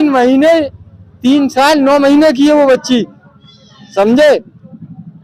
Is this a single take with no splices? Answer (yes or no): yes